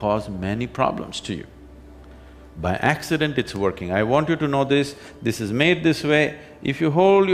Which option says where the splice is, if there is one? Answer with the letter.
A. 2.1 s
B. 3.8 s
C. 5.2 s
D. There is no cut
D